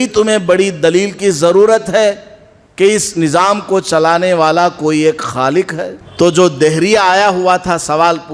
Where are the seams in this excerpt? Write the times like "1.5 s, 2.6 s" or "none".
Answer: 6.0 s